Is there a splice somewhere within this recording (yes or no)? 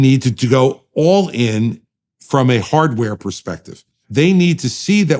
yes